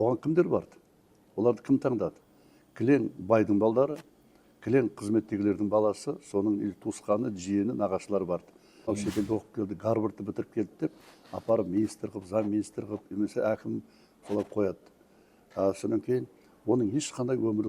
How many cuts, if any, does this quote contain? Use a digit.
1